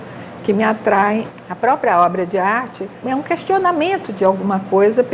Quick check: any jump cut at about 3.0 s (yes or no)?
yes